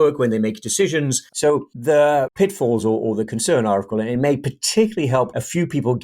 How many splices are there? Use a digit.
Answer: 2